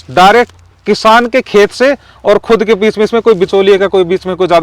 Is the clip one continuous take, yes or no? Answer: yes